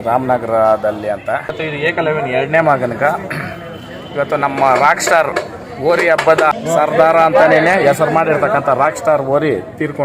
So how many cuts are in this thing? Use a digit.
2